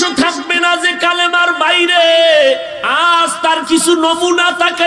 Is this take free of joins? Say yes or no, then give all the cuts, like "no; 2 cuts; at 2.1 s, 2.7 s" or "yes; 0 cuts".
no; 1 cut; at 2.8 s